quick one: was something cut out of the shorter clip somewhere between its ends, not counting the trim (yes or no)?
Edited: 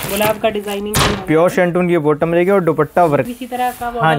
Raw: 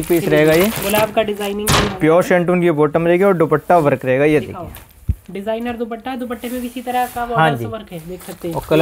yes